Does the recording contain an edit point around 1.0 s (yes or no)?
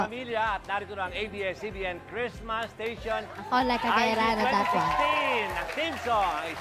no